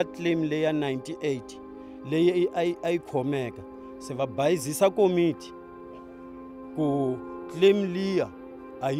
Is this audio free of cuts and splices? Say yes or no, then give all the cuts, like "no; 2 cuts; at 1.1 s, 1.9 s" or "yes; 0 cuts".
yes; 0 cuts